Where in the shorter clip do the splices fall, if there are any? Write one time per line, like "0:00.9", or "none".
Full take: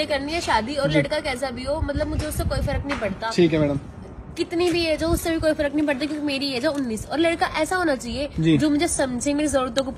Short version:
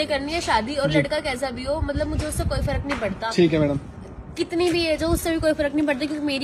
none